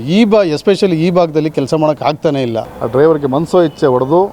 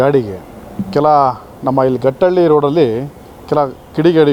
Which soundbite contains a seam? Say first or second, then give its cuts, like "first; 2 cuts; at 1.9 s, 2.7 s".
first; 1 cut; at 2.6 s